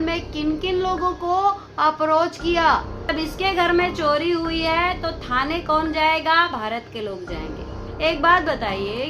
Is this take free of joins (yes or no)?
no